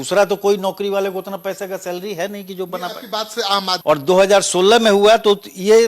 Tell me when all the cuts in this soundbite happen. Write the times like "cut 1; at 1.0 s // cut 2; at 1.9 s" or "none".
cut 1; at 3.8 s

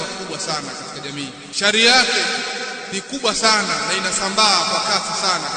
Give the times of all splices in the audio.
cut 1; at 1.4 s // cut 2; at 2.8 s

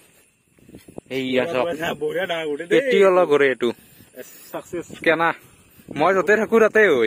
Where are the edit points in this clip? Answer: none

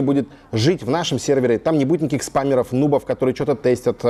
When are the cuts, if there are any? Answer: none

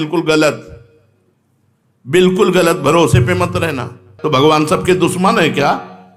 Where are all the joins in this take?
cut 1; at 4.1 s

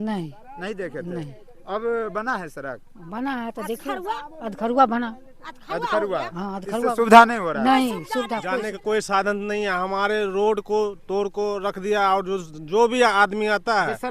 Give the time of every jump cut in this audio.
cut 1; at 8.4 s

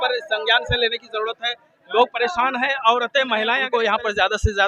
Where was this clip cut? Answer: cut 1; at 3.6 s

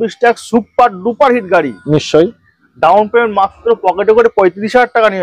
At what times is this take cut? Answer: none

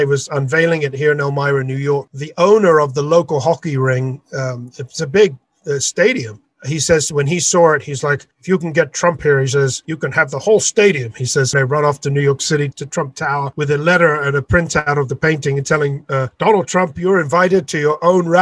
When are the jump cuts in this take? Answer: cut 1; at 11.5 s // cut 2; at 12.7 s // cut 3; at 16.3 s

